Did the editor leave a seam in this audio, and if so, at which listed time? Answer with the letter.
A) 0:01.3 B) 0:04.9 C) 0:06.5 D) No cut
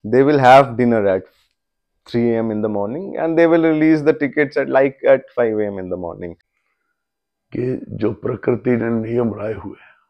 C